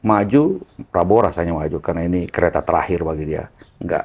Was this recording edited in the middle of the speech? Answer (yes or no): no